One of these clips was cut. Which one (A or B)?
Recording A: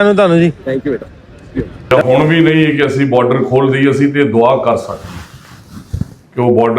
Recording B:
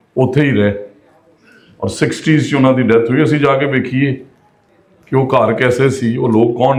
A